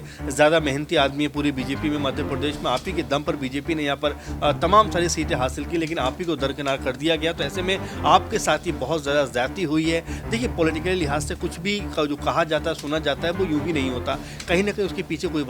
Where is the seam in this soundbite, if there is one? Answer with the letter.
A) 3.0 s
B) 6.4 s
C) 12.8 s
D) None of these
D